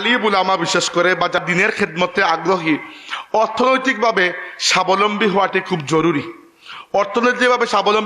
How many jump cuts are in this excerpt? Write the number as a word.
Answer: one